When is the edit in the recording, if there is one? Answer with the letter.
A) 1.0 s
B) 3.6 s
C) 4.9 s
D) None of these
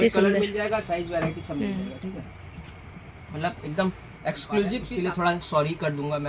C